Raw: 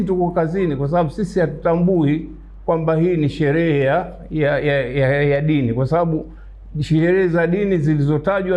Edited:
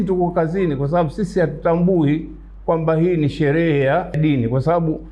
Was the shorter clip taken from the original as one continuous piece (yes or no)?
no